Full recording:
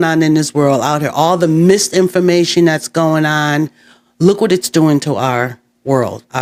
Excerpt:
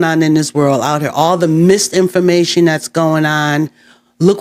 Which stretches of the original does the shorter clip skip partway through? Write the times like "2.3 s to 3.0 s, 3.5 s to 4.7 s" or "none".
none